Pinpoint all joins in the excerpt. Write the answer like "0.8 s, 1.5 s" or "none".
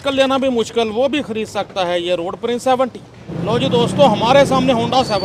none